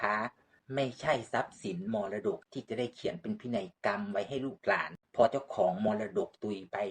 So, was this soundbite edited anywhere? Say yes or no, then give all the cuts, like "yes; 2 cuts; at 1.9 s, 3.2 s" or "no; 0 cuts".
yes; 2 cuts; at 2.4 s, 5.0 s